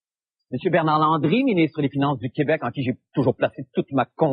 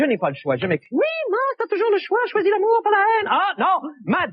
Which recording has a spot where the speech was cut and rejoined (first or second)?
first